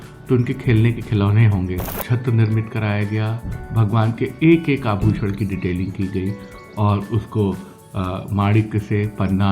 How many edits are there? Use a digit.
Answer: 1